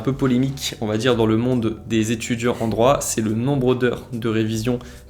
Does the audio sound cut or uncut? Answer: uncut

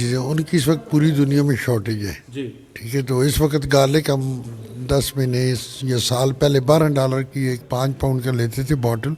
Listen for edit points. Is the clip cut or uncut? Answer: uncut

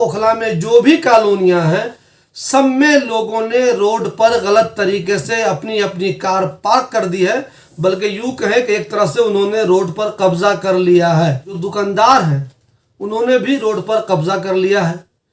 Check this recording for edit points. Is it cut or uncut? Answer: cut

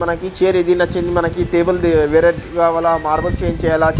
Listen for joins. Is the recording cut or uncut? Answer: uncut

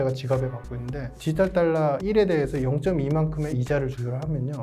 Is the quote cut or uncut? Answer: cut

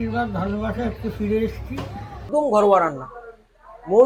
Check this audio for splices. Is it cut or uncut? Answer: cut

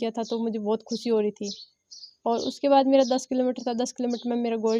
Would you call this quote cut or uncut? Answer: uncut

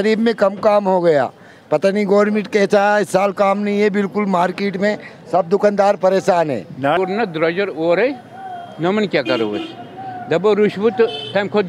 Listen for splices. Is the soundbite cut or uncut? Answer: cut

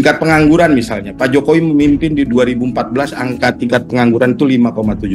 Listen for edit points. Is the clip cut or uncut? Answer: uncut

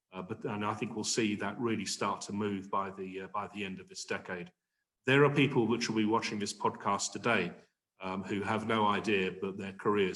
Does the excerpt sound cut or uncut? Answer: uncut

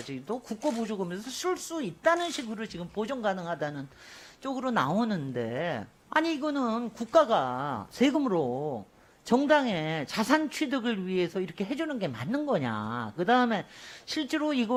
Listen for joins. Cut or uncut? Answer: uncut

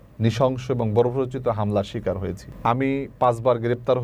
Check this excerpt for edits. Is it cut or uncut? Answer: cut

